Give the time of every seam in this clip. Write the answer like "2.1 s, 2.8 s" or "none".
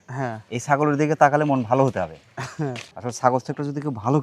2.9 s